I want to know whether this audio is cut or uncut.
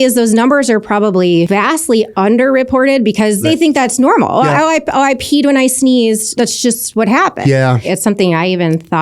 cut